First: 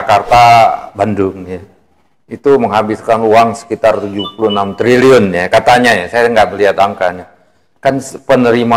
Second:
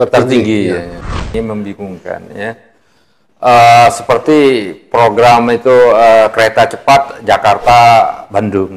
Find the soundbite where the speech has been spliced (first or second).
second